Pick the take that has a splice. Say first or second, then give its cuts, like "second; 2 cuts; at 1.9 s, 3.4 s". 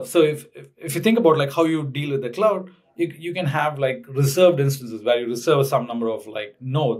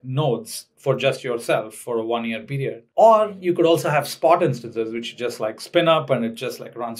second; 1 cut; at 2.8 s